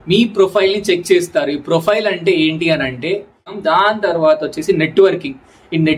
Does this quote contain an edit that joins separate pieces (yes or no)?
yes